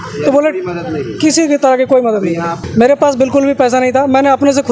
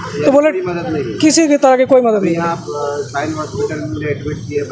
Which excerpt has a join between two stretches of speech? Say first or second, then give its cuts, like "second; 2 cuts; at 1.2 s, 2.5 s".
first; 1 cut; at 2.6 s